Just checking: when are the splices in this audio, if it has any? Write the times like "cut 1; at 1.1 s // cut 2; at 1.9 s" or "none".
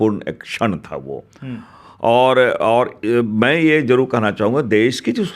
none